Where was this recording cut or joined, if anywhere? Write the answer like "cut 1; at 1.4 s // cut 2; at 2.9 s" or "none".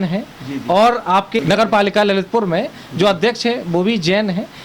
cut 1; at 1.4 s